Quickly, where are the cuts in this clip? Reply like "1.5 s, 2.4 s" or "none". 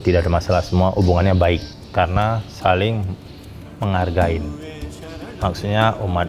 1.8 s